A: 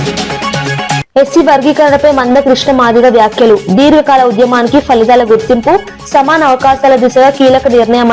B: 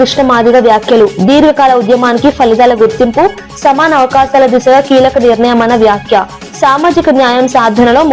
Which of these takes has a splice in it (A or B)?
A